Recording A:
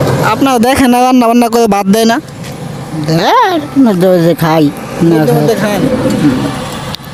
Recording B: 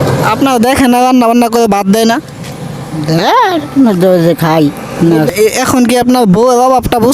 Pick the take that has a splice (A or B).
B